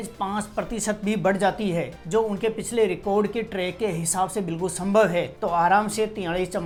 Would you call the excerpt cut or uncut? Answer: uncut